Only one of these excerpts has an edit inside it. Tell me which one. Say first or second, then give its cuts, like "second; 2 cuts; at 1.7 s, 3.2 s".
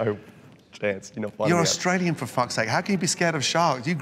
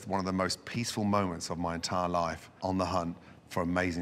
second; 1 cut; at 2.6 s